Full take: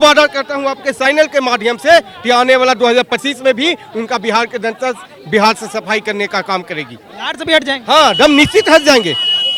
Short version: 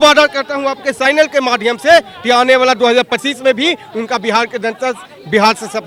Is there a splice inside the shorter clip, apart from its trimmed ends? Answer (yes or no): no